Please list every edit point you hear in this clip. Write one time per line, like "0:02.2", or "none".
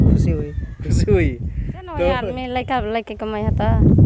0:02.3